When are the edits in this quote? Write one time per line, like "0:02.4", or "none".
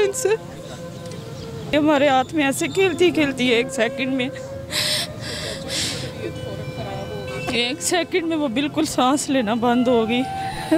0:01.7